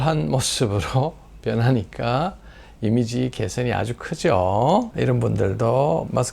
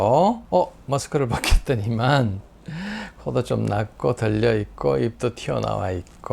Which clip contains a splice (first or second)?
first